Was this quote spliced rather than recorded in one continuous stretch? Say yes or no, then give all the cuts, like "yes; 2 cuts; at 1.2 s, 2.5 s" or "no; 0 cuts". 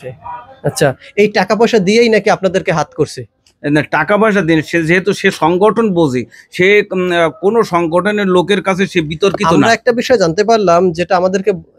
no; 0 cuts